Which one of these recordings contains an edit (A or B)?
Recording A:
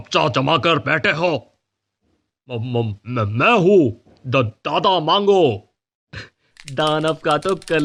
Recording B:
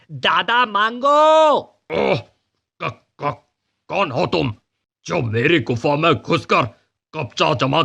B